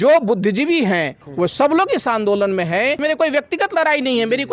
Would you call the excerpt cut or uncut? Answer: cut